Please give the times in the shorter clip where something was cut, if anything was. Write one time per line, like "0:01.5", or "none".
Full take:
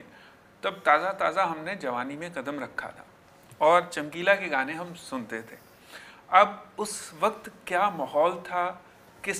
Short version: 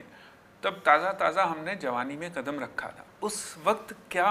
0:03.1